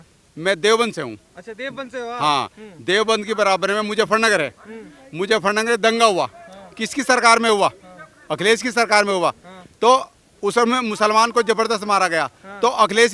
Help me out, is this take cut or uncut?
uncut